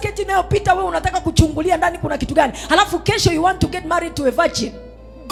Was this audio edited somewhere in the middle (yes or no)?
no